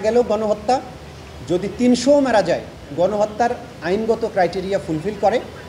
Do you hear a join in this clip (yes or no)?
no